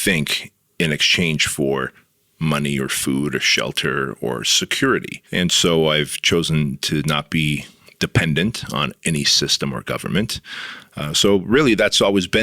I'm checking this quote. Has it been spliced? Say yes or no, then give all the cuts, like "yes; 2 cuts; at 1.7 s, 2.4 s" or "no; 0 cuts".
yes; 1 cut; at 5.2 s